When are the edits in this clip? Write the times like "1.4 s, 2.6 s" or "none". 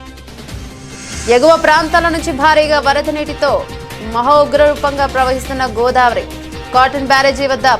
none